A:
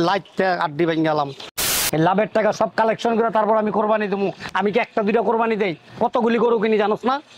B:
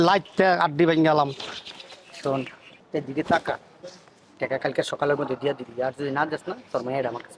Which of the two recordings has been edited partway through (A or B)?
A